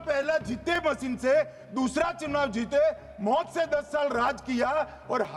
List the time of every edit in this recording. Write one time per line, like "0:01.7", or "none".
none